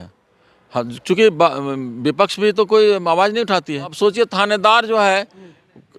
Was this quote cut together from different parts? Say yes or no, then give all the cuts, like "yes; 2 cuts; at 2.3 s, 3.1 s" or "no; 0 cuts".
yes; 1 cut; at 3.9 s